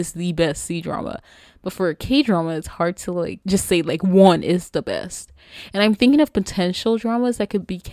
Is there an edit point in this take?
yes; 1 cut; at 3.4 s

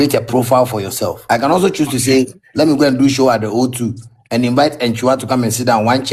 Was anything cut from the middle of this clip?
yes; 1 cut; at 1.2 s

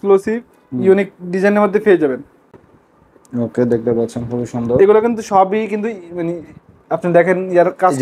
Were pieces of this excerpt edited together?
no; 0 cuts

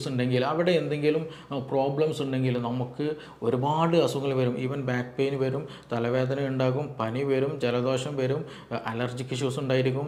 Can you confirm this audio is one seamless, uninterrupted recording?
yes; 0 cuts

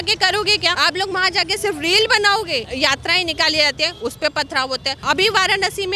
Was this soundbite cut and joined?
yes; 3 cuts; at 0.8 s, 2.7 s, 5.0 s

